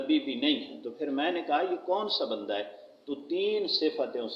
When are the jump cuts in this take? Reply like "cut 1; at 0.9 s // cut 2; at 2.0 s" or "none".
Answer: none